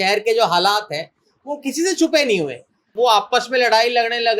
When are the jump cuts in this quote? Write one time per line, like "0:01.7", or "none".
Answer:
0:02.9